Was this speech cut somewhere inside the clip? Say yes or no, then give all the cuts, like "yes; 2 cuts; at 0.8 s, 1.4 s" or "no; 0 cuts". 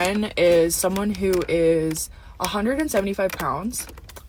no; 0 cuts